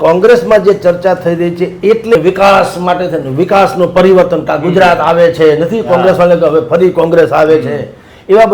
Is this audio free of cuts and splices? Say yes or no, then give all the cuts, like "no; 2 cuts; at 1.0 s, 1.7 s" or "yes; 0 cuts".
no; 1 cut; at 2.1 s